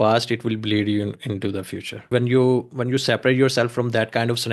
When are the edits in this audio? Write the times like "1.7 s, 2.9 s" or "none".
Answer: 2.1 s